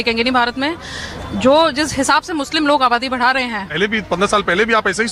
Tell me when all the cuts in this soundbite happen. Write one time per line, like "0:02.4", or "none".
0:03.7